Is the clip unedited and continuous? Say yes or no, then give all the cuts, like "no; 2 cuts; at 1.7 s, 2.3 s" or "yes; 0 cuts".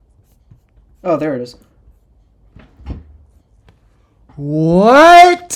yes; 0 cuts